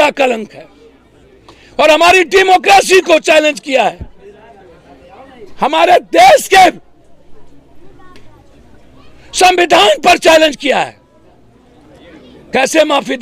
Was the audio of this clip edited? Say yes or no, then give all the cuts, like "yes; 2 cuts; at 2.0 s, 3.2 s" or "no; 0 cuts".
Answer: no; 0 cuts